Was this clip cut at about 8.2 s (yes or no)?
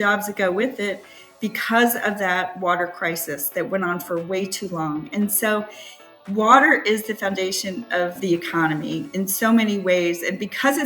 yes